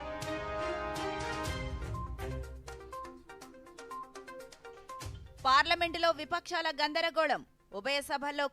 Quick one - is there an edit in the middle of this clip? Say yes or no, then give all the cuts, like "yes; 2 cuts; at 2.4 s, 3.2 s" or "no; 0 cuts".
no; 0 cuts